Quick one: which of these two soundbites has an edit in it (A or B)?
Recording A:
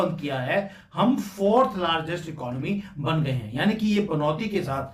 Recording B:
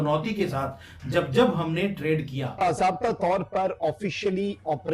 B